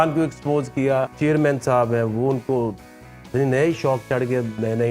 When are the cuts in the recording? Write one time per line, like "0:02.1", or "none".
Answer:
0:01.1